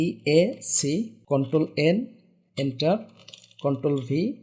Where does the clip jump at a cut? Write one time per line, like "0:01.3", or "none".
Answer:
0:01.2